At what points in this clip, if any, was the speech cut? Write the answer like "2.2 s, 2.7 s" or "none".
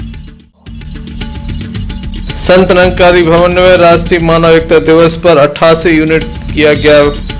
1.0 s